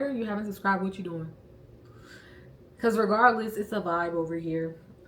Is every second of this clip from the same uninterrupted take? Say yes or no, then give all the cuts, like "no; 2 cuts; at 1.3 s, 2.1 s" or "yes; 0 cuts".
yes; 0 cuts